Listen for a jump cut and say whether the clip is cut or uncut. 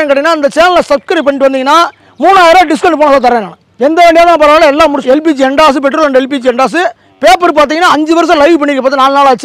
cut